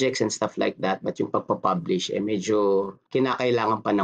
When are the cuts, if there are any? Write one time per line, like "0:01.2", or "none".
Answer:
0:01.4
0:03.0

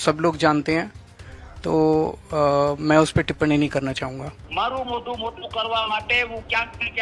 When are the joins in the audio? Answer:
0:04.4

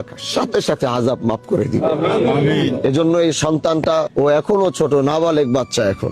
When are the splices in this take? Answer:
0:04.1

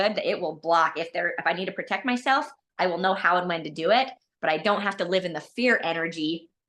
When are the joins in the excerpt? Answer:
none

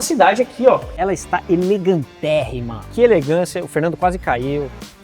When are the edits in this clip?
0:00.9
0:02.8

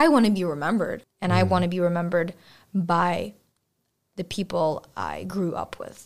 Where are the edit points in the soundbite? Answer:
0:01.0

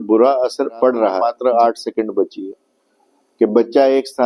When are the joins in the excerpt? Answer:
0:01.3

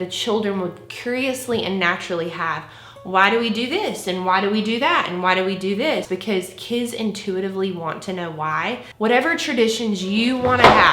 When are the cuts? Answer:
0:06.1
0:08.8

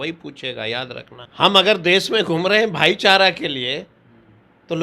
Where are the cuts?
0:01.2

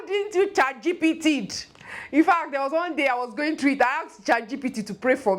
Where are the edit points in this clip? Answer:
none

